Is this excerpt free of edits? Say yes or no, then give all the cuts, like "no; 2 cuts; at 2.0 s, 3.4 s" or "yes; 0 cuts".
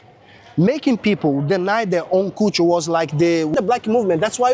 no; 1 cut; at 3.5 s